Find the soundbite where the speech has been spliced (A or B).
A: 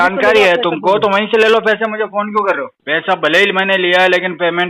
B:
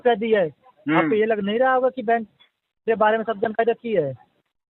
A